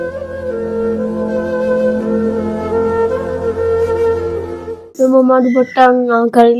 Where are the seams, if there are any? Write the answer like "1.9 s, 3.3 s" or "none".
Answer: none